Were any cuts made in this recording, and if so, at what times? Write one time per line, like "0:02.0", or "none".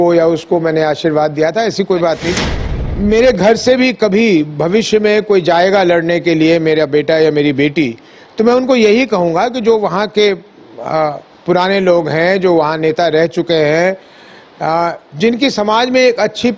0:02.4